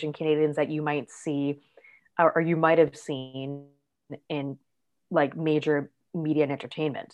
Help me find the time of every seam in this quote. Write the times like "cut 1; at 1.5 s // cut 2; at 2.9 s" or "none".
none